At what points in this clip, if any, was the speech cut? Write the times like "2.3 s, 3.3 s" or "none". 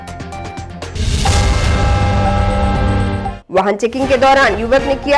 3.4 s